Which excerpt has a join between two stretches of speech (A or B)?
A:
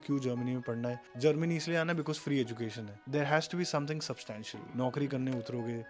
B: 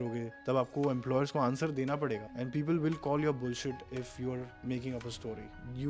A